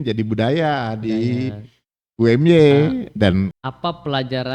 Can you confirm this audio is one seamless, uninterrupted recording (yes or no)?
no